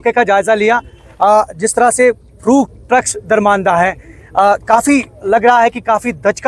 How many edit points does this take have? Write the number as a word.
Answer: zero